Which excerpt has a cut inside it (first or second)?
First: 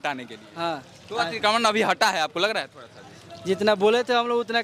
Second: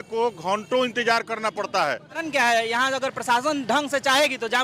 second